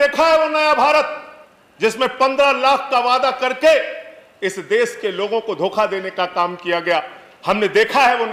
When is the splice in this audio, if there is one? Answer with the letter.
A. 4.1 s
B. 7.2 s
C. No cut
C